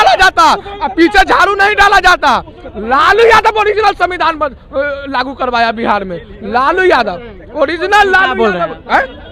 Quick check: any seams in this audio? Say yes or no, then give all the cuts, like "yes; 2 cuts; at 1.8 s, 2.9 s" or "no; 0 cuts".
no; 0 cuts